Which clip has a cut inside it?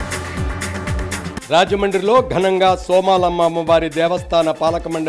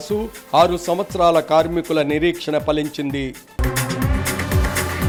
first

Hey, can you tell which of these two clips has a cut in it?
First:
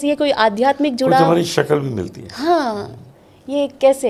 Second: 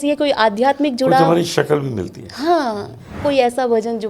second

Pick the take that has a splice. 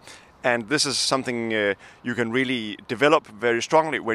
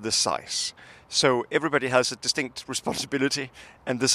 first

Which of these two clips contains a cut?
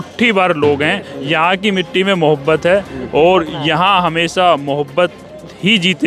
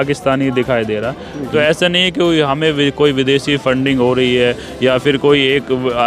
second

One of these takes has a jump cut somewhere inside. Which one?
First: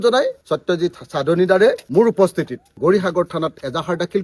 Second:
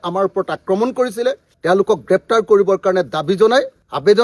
second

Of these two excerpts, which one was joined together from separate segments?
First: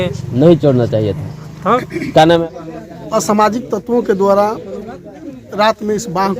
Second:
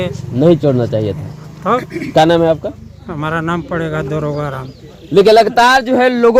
first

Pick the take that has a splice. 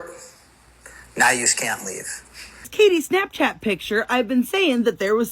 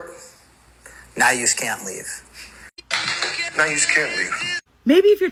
first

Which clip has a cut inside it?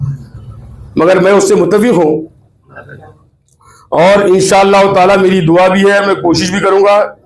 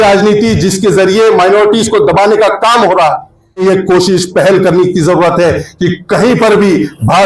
second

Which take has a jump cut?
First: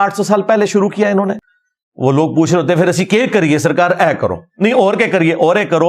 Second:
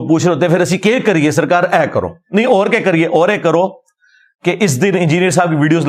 first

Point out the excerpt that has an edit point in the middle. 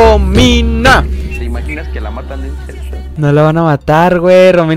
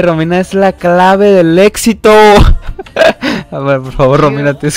first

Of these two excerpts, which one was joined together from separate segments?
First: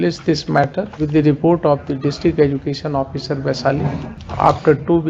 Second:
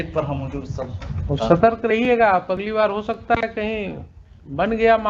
first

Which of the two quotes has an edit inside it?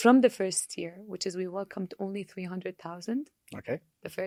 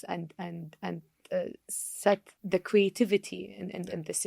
second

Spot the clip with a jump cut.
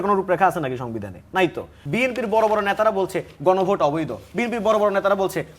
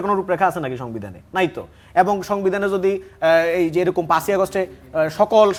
first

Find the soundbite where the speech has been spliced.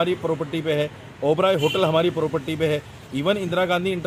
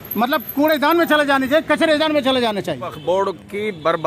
second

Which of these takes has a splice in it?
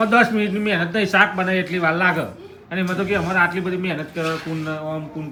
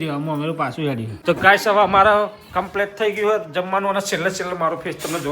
second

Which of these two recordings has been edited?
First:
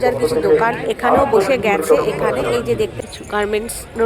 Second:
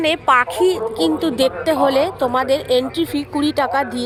first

